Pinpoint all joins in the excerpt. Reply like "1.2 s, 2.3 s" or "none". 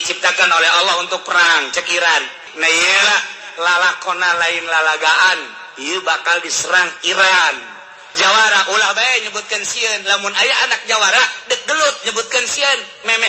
2.5 s, 8.2 s